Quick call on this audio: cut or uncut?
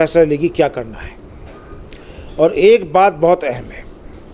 uncut